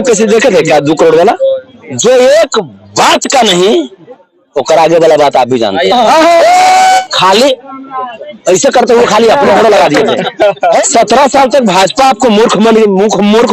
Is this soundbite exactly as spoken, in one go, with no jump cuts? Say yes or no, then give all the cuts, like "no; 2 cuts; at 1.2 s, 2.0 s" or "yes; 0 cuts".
no; 3 cuts; at 1.7 s, 7.0 s, 10.9 s